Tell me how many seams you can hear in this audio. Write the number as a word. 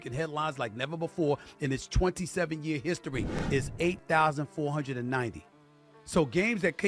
one